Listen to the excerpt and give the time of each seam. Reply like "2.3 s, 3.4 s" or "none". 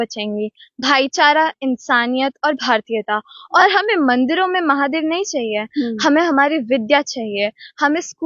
3.6 s